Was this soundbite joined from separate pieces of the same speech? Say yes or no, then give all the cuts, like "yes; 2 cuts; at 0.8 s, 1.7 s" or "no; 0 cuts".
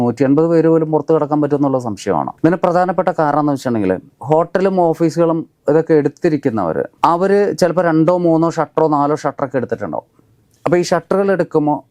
no; 0 cuts